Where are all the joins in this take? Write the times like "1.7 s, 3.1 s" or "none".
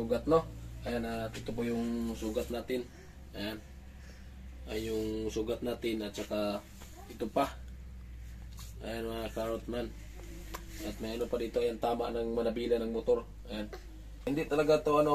14.2 s

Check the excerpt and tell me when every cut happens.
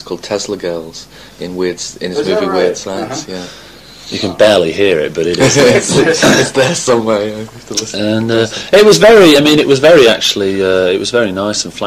1.3 s

